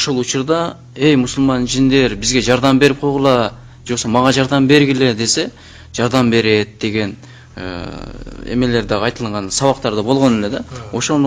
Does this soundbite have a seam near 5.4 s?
no; 0 cuts

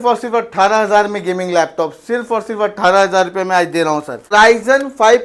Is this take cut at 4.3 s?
yes; 1 cut; at 4.3 s

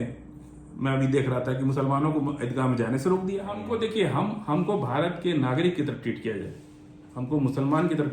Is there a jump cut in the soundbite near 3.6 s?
yes; 1 cut; at 3.6 s

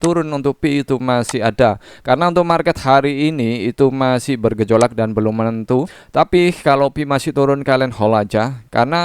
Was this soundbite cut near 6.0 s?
yes; 1 cut; at 6.0 s

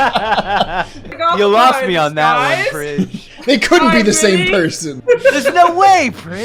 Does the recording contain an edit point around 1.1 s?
yes; 2 cuts; at 1.1 s, 4.9 s

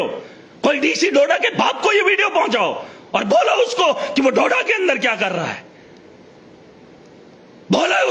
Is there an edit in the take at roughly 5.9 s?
no; 0 cuts

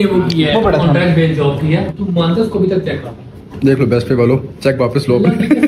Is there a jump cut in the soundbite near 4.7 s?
no; 2 cuts; at 2.0 s, 3.5 s

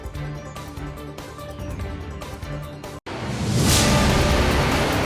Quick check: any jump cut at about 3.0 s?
yes; 1 cut; at 3.0 s

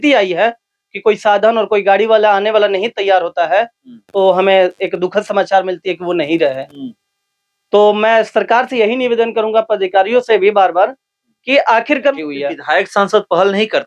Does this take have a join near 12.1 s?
yes; 1 cut; at 12.1 s

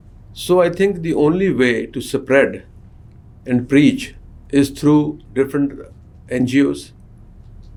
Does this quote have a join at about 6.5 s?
no; 0 cuts

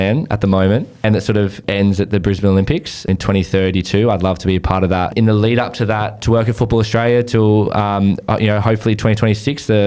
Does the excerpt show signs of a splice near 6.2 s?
yes; 4 cuts; at 1.4 s, 3.1 s, 5.1 s, 6.2 s

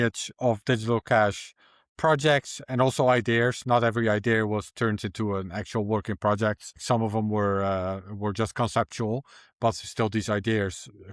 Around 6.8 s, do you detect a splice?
yes; 1 cut; at 6.8 s

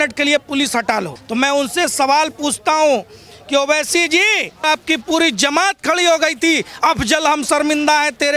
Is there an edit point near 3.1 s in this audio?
no; 2 cuts; at 1.2 s, 4.6 s

